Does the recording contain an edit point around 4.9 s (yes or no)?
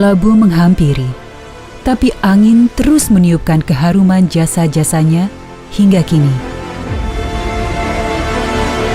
no